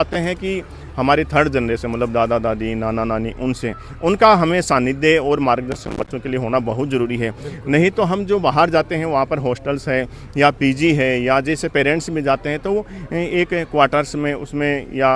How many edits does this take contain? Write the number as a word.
zero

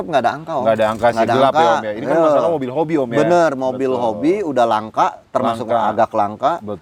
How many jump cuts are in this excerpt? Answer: zero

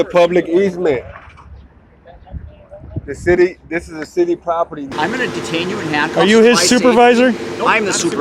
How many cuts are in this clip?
one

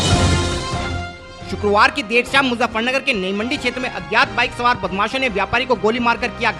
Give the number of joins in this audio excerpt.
one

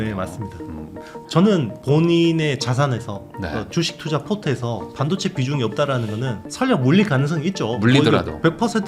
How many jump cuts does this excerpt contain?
one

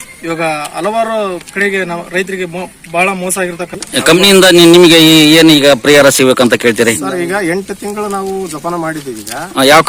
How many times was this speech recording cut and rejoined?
one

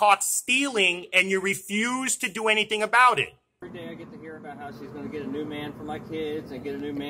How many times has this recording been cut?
one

